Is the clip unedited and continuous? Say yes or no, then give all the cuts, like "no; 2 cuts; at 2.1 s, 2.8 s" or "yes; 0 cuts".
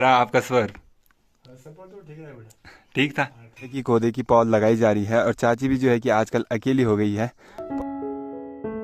no; 2 cuts; at 3.8 s, 7.6 s